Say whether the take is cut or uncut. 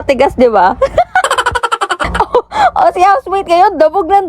cut